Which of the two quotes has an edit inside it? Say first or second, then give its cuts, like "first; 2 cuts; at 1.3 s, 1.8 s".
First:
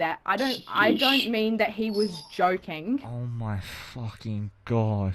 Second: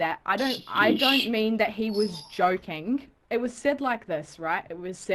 second; 1 cut; at 3.1 s